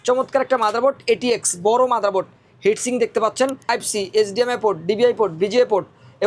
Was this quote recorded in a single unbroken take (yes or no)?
no